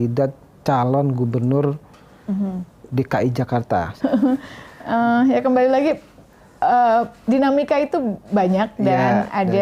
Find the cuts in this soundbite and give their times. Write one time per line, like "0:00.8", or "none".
0:03.9